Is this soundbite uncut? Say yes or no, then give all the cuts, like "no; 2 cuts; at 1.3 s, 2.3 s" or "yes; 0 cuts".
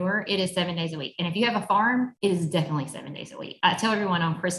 no; 2 cuts; at 2.1 s, 3.4 s